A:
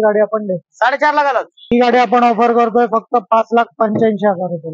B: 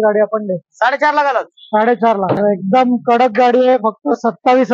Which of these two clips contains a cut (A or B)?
A